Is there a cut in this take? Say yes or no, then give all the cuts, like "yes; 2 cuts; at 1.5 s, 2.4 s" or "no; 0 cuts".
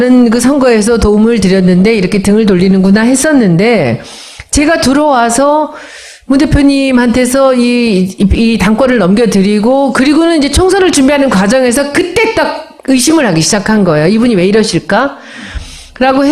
no; 0 cuts